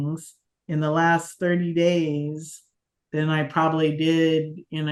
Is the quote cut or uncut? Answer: uncut